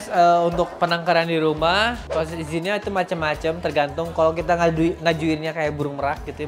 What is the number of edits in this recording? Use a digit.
0